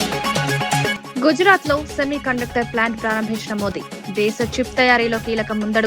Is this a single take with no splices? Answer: no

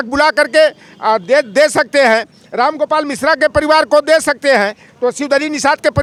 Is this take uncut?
yes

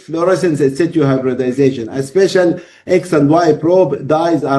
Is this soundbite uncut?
yes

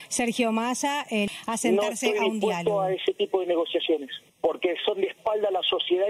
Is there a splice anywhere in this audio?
yes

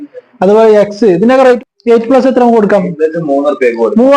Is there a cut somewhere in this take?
yes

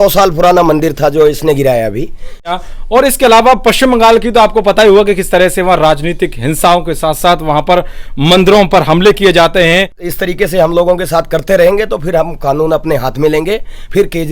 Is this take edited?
yes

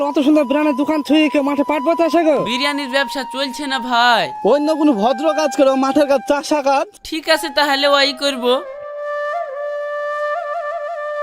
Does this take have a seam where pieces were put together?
no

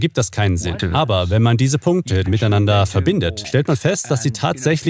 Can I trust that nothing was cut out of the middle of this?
no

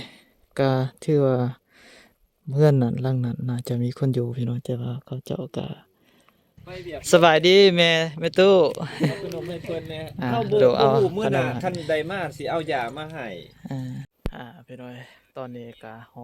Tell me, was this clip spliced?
yes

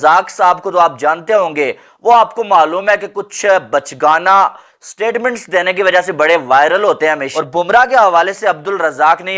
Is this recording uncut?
no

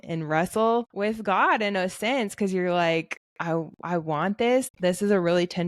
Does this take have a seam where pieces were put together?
yes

